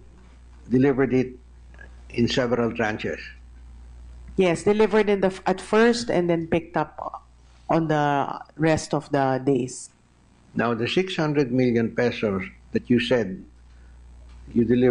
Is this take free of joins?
no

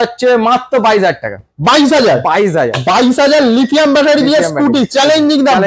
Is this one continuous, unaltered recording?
yes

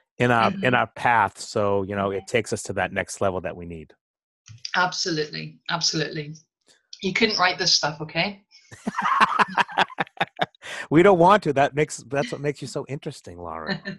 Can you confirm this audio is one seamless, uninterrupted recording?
yes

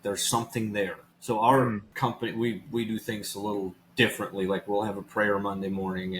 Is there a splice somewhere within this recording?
yes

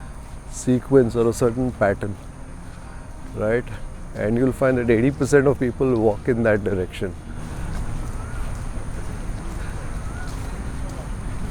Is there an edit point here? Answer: no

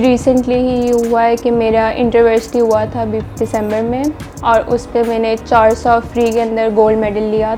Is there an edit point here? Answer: no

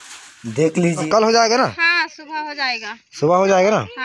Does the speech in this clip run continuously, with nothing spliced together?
no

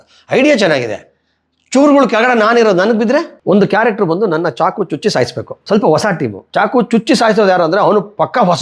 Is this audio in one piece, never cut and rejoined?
no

